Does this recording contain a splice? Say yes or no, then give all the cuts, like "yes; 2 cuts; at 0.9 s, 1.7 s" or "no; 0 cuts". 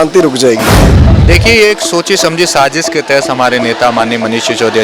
yes; 1 cut; at 0.9 s